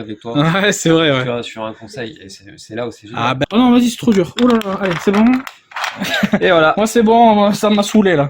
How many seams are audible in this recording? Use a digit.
1